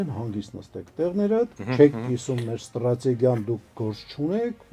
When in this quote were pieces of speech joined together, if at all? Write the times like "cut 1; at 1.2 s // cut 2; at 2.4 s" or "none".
cut 1; at 1.6 s